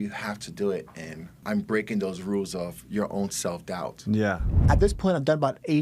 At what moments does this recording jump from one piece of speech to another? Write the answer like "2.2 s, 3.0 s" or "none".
1.4 s, 4.6 s